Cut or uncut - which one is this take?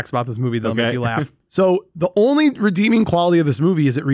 uncut